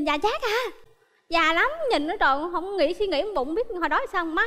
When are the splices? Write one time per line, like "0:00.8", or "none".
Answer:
none

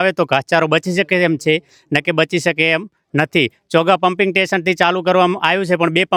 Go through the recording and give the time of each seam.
none

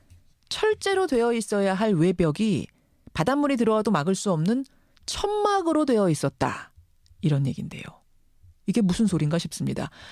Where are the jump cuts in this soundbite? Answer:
none

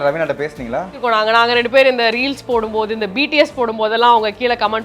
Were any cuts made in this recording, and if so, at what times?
0:00.9

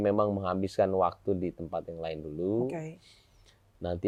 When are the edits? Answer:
none

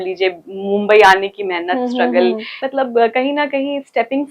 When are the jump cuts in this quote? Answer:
0:02.5

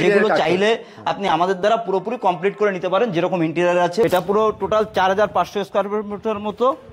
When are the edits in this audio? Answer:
0:04.0

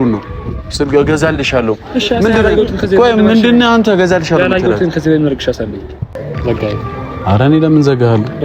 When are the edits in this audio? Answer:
0:06.2

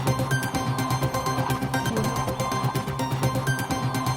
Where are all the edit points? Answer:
0:02.0

